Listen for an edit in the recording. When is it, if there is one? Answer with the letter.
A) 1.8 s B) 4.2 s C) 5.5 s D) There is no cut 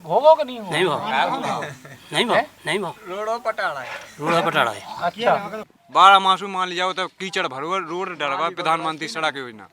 C